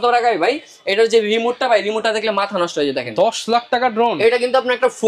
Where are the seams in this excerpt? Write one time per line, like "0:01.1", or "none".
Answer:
none

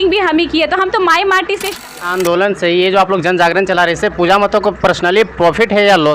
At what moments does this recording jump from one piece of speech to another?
0:01.9

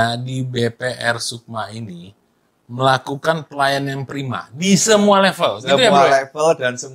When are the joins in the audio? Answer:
none

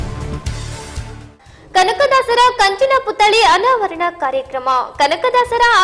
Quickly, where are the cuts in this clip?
none

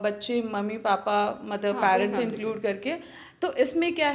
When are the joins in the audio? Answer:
none

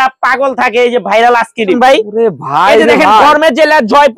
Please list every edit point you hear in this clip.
0:01.8

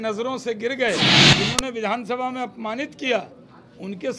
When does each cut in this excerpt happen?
0:01.2

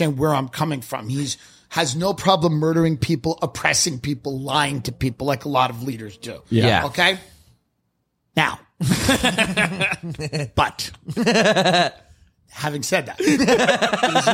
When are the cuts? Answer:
none

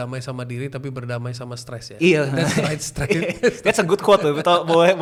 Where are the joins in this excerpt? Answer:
none

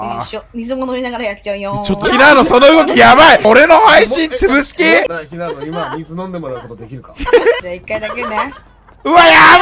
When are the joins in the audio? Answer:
0:02.0
0:03.4
0:05.1
0:07.6

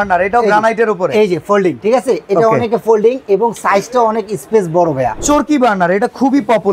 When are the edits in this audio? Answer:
0:01.8
0:05.2

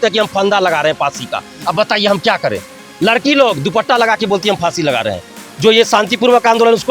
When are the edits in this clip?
0:05.4

